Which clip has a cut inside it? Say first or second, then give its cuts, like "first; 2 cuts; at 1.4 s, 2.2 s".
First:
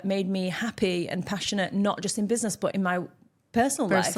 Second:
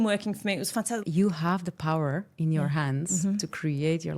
second; 1 cut; at 1.0 s